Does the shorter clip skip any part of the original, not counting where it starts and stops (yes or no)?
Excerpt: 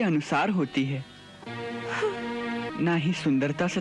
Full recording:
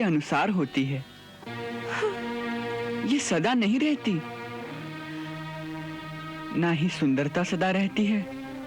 yes